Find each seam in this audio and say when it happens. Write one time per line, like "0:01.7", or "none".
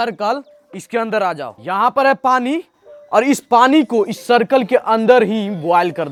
none